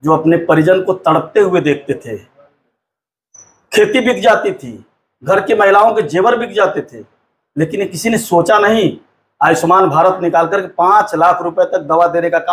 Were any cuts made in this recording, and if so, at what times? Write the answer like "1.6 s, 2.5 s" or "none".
none